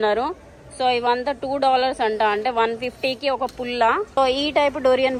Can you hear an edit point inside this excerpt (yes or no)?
yes